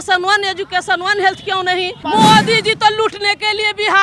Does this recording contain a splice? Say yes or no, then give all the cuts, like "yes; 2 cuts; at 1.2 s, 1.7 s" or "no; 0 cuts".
yes; 1 cut; at 2.0 s